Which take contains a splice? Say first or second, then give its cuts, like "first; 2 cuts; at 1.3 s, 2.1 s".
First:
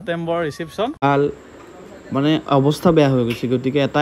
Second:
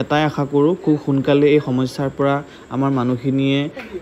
first; 1 cut; at 1.0 s